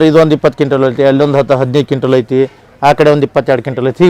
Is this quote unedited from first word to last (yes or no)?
yes